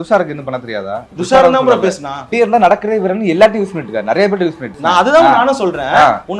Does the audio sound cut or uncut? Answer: cut